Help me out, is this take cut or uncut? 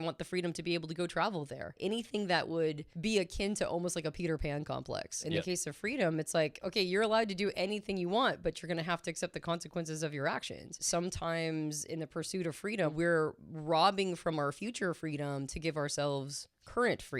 cut